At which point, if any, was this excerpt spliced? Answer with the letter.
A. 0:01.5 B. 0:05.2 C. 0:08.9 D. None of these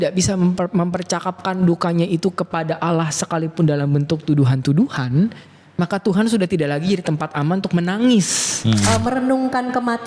C